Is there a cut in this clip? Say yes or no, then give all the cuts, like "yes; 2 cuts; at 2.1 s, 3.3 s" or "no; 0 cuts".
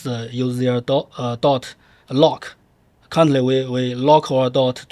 no; 0 cuts